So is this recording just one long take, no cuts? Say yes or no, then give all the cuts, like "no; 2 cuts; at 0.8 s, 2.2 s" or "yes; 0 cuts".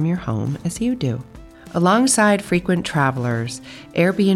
yes; 0 cuts